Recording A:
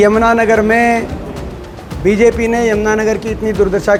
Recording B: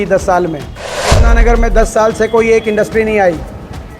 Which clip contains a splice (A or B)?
B